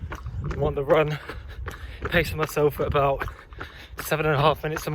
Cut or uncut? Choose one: uncut